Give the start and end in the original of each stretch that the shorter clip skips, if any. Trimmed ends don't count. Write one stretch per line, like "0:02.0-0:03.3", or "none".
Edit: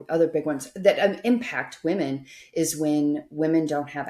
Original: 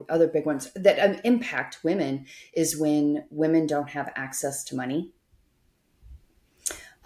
none